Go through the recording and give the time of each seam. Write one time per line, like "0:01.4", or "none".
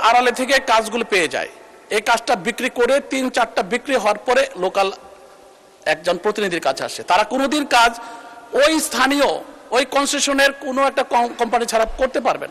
none